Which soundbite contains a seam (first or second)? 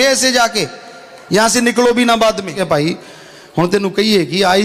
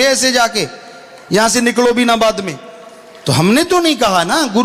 first